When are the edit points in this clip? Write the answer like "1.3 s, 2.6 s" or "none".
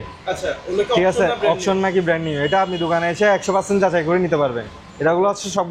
none